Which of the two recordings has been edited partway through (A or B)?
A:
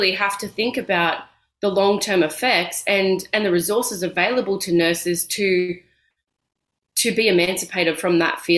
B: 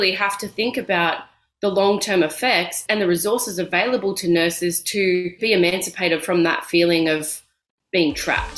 B